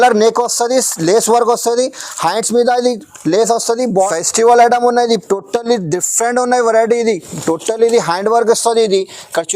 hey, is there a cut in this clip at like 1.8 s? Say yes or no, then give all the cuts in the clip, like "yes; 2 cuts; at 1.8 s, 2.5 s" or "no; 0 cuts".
no; 1 cut; at 3.9 s